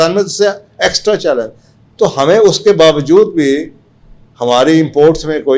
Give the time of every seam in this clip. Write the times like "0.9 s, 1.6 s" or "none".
none